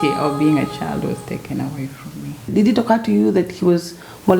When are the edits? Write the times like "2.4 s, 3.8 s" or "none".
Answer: 2.3 s

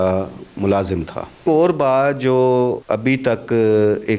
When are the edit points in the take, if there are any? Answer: 1.4 s, 2.8 s

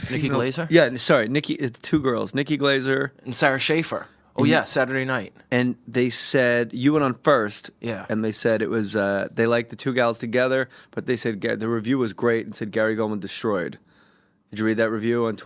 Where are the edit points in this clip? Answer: 8.8 s

